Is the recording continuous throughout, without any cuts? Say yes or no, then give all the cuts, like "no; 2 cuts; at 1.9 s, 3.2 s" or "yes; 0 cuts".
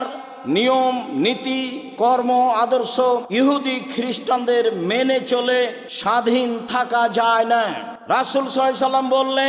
no; 3 cuts; at 3.3 s, 5.9 s, 7.9 s